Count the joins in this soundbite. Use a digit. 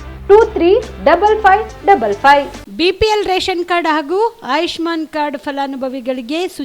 1